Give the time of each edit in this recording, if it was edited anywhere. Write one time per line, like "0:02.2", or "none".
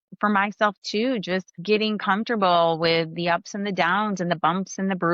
0:01.5

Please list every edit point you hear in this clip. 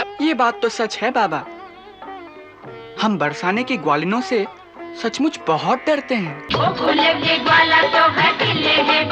0:06.4

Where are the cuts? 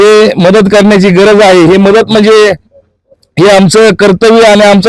none

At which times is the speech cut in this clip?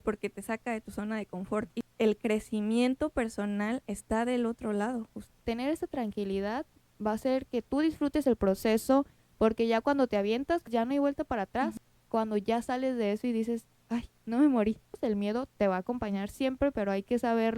0:01.8
0:05.3
0:09.2
0:10.6
0:11.7
0:14.9

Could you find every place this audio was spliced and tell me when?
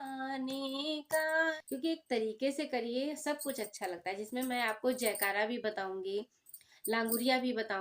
0:01.5

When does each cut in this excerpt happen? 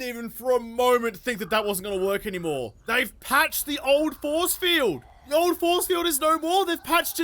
0:02.8
0:05.1

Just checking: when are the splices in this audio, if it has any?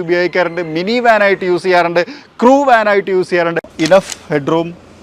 0:03.7

